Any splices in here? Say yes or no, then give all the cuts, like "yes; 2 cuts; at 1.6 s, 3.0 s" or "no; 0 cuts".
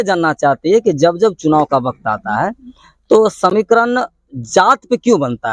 no; 0 cuts